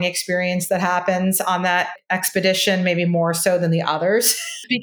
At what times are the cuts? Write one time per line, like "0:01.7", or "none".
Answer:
0:02.0